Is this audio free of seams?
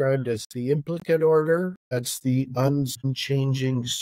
no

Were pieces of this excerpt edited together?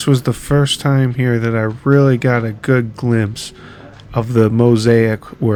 no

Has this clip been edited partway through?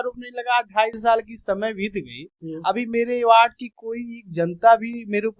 no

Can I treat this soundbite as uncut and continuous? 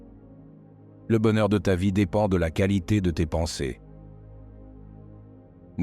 no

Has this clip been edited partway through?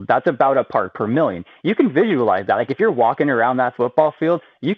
no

